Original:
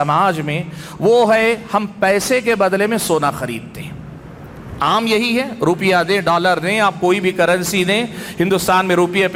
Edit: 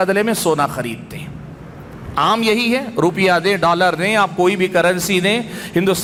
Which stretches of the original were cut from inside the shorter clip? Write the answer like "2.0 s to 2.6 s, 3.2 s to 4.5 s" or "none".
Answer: none